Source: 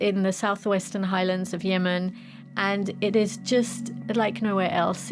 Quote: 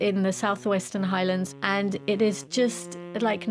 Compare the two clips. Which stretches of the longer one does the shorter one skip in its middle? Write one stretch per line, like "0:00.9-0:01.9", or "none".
0:01.5-0:02.5